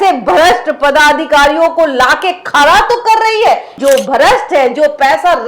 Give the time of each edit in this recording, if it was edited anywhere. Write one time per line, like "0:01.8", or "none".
0:03.8